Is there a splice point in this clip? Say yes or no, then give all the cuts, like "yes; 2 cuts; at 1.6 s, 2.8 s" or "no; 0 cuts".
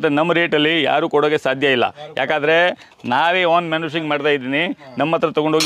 no; 0 cuts